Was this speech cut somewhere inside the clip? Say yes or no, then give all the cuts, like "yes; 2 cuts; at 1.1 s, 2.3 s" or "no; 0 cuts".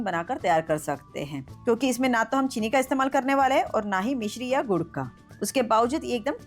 yes; 1 cut; at 1.4 s